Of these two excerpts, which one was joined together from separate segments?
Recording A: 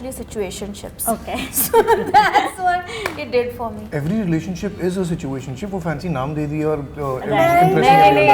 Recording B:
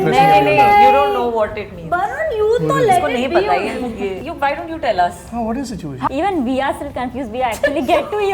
B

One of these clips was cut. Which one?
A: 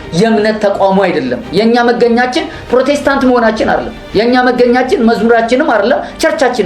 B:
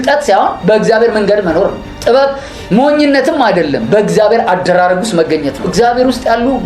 B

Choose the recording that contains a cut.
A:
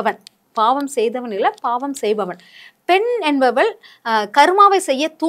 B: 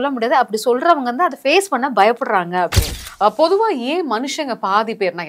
B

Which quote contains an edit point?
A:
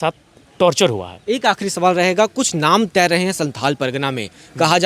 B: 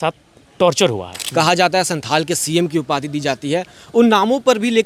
B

